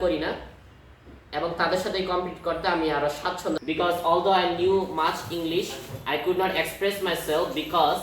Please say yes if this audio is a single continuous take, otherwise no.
no